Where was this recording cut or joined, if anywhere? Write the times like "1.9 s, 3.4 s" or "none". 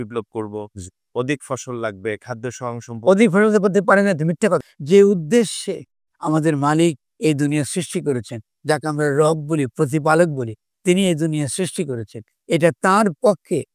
4.6 s